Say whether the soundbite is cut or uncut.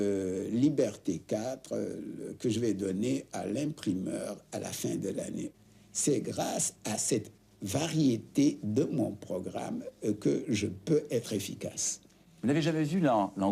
cut